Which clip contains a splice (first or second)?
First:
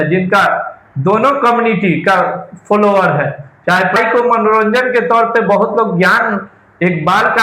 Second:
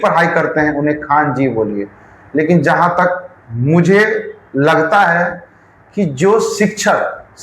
first